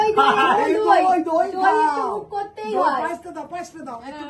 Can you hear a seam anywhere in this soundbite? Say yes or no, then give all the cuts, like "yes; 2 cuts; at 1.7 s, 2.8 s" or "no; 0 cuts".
no; 0 cuts